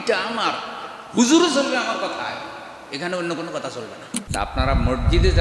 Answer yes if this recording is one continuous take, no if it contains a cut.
no